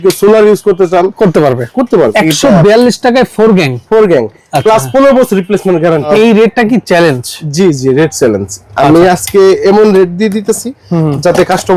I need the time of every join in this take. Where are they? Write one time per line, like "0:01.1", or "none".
0:02.1
0:06.1